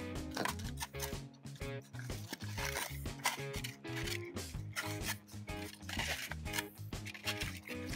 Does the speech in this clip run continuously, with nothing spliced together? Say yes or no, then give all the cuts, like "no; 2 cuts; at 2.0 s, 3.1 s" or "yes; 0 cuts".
no; 1 cut; at 5.7 s